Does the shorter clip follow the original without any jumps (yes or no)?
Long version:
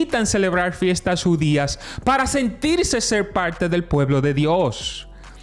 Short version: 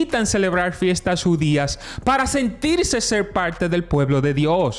yes